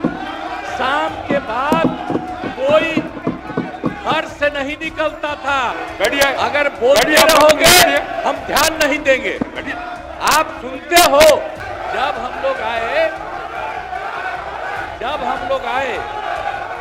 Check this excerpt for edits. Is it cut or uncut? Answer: cut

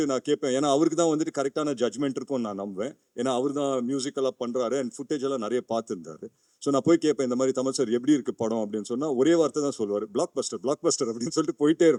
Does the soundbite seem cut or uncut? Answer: uncut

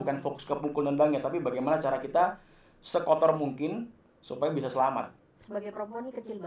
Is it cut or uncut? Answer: cut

